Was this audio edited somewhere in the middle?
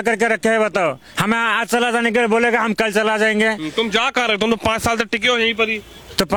no; 0 cuts

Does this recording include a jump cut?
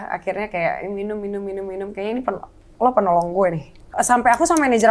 yes; 1 cut; at 3.8 s

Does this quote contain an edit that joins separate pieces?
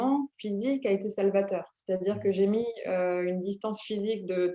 no; 0 cuts

